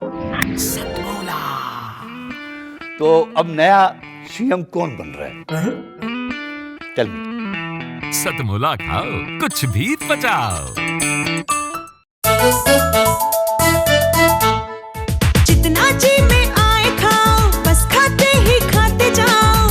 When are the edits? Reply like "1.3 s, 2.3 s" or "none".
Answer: 12.1 s